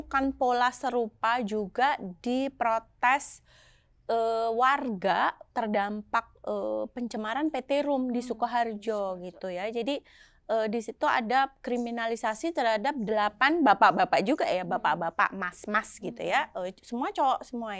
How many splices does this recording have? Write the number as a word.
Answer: zero